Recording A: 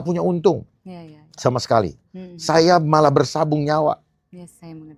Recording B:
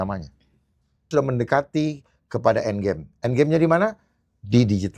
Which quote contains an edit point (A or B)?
B